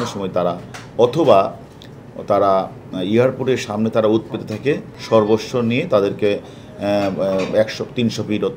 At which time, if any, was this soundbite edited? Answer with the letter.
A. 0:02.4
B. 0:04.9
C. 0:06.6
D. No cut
B